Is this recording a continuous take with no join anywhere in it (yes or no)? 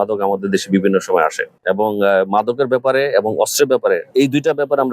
no